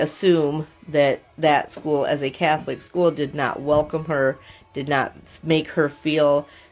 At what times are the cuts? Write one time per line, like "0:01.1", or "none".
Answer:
none